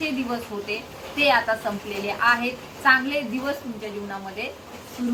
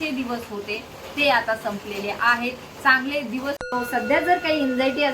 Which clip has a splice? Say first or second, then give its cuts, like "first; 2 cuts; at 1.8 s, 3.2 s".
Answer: second; 1 cut; at 3.6 s